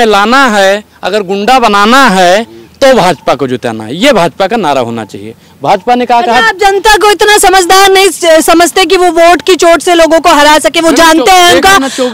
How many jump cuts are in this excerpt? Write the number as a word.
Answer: zero